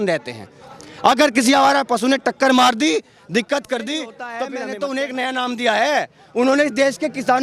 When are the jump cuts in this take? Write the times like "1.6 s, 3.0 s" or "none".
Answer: 4.4 s